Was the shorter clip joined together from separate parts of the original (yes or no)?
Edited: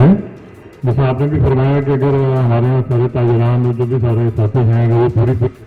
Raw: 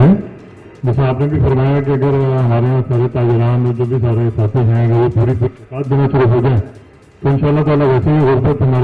no